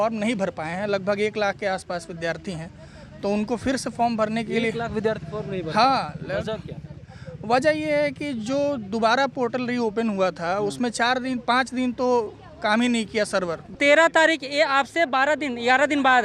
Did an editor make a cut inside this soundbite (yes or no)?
yes